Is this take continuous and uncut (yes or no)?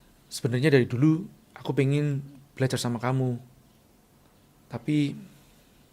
no